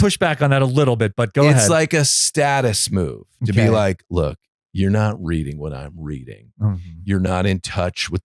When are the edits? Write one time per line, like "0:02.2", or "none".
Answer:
none